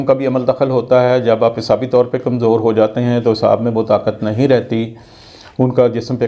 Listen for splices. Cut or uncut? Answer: uncut